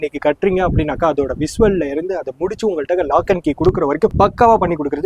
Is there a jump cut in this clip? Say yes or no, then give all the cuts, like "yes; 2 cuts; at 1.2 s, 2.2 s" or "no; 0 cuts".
yes; 1 cut; at 4.1 s